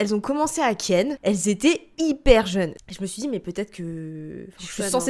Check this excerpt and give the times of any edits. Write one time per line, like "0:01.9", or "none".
0:01.1
0:02.8